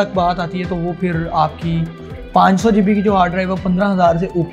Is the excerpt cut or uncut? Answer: uncut